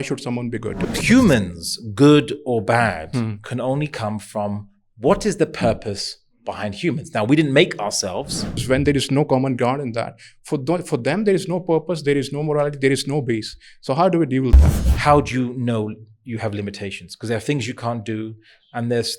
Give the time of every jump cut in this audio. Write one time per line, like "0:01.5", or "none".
0:01.0
0:08.6
0:14.7